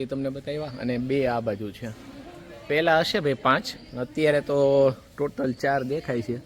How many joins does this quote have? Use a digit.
0